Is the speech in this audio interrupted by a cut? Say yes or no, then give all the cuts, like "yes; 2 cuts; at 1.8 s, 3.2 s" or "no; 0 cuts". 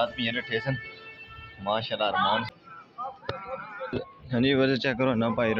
yes; 1 cut; at 2.5 s